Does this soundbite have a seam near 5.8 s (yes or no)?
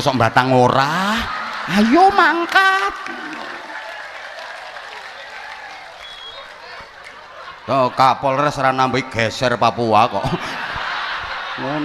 no